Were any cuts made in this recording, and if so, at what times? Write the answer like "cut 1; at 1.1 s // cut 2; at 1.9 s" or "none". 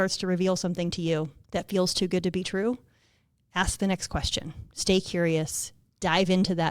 cut 1; at 1.4 s